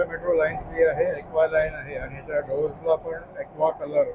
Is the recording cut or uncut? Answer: uncut